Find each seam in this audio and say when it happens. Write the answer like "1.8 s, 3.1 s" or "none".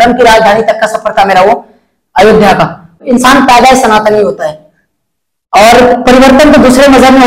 3.0 s